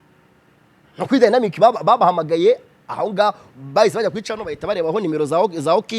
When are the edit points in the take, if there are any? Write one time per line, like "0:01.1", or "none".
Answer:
none